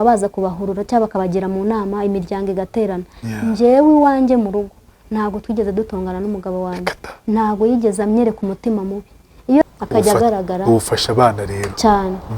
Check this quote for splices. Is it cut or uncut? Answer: cut